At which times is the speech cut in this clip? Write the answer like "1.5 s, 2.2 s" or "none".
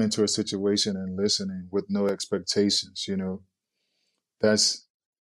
none

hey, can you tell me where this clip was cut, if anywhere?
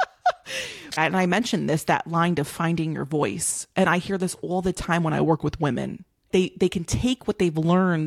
1.0 s, 6.3 s

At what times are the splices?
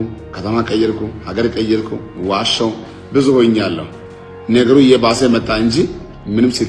none

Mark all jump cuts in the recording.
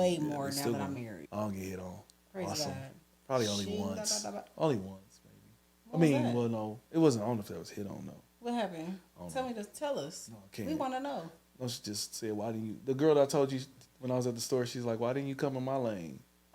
1.2 s

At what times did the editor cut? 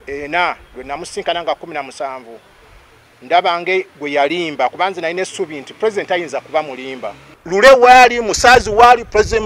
7.3 s

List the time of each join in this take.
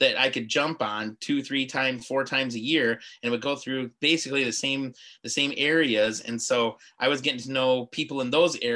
none

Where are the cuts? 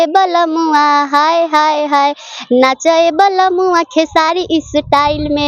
none

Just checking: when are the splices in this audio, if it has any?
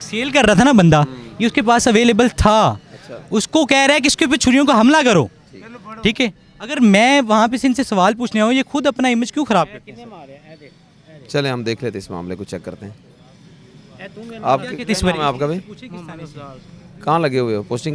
none

